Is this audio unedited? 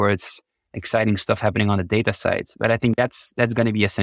yes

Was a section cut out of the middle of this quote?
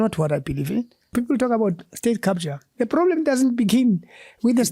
yes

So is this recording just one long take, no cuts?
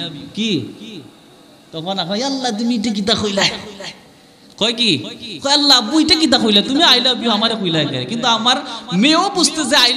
yes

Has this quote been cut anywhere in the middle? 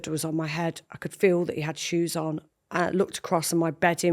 yes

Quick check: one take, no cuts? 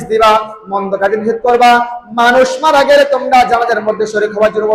yes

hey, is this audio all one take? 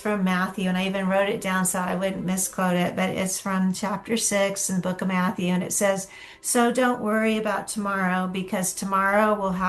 yes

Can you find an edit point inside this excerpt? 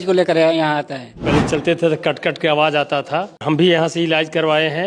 yes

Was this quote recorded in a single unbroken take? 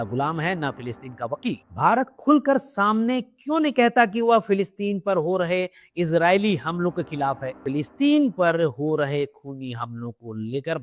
no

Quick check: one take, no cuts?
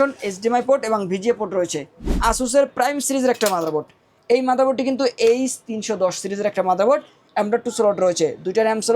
no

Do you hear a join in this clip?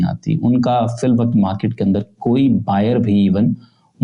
no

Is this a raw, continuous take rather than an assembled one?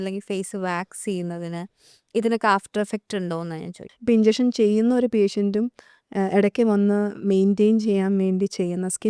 no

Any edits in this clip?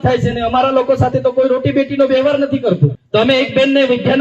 yes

